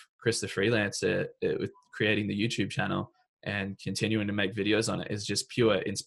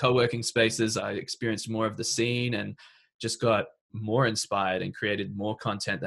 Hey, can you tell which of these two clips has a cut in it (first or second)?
second